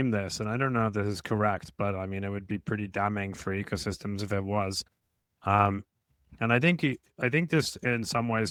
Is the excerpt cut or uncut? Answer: uncut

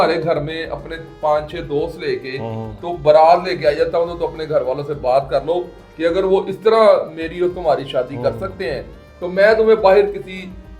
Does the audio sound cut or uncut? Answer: uncut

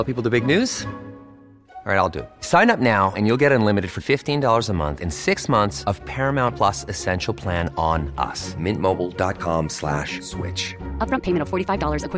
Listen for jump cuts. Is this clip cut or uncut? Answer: uncut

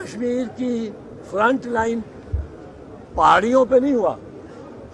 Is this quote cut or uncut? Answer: uncut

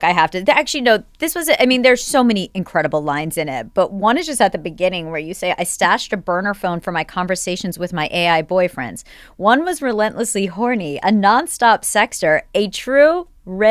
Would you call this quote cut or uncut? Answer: uncut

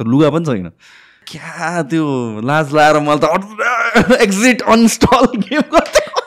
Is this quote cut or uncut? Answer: cut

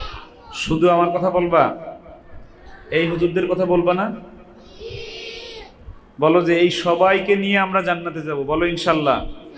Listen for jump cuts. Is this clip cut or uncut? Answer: uncut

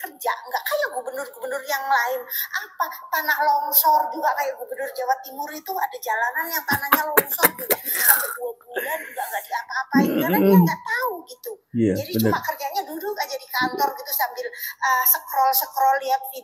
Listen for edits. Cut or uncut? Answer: uncut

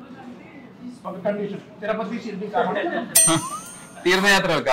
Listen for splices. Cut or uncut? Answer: cut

